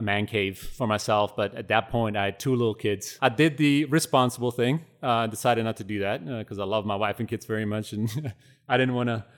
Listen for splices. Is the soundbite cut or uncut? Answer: cut